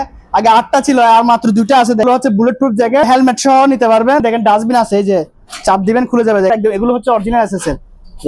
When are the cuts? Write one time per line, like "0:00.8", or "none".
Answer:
0:02.0
0:03.0
0:04.2
0:06.5